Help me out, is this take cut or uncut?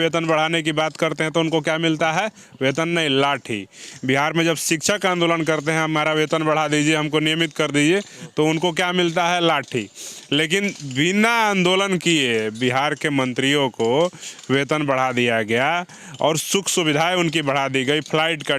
uncut